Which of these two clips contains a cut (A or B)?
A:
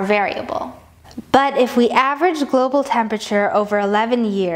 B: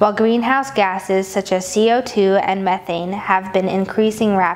B